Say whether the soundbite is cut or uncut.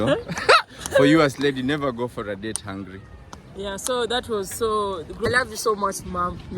cut